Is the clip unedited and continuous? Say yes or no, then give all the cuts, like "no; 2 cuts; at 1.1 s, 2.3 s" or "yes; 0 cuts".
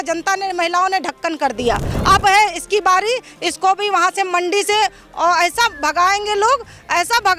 no; 1 cut; at 1.9 s